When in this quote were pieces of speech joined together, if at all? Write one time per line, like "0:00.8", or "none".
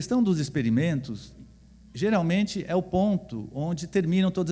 0:01.3